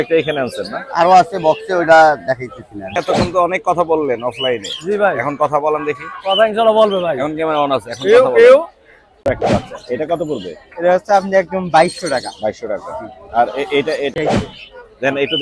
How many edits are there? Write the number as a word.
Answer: three